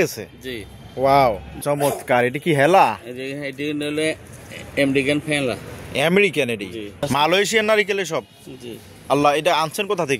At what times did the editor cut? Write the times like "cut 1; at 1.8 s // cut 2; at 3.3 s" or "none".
cut 1; at 1.5 s // cut 2; at 7.1 s